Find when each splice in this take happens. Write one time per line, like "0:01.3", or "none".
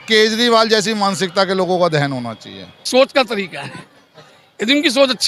0:02.9